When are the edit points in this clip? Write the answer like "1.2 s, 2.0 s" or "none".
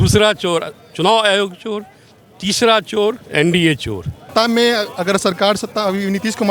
3.2 s, 4.2 s